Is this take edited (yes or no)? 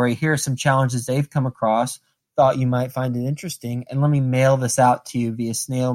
no